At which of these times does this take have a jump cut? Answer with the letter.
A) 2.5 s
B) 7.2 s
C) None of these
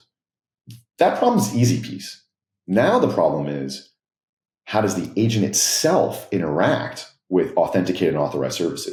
C